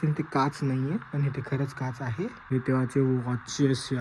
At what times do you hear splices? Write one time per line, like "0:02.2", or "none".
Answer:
0:02.4